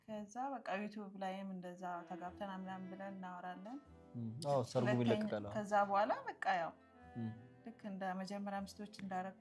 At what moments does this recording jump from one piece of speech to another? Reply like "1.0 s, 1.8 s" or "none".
none